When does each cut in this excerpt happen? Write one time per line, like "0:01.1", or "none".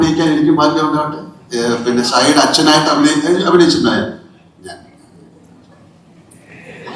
none